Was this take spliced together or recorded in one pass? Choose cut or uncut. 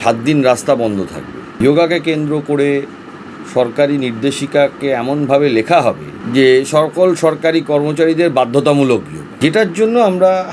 cut